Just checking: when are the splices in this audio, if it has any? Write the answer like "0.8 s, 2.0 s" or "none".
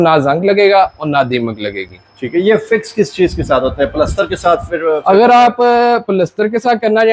none